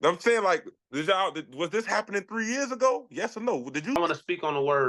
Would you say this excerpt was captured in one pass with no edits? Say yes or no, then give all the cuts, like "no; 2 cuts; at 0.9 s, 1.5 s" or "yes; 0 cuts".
no; 1 cut; at 4.0 s